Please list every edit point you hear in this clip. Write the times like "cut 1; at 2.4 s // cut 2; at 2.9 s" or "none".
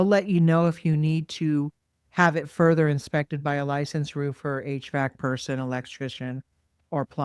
none